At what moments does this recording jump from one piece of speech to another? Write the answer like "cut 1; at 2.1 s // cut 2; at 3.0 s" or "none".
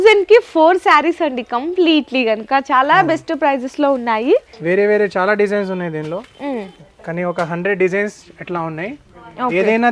cut 1; at 4.5 s